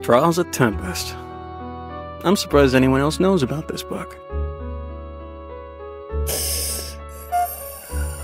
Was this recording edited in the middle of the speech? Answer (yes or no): no